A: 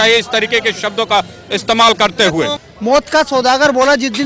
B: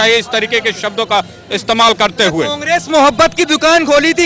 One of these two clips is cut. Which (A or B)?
A